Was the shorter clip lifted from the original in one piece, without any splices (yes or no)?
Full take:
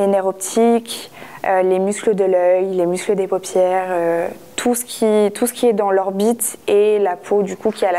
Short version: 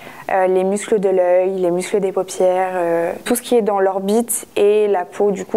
no